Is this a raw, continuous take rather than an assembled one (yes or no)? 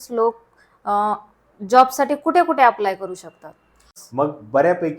no